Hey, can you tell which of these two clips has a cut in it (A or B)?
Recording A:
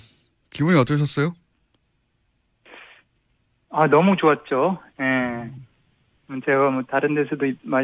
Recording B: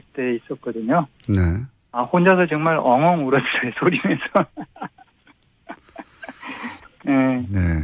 B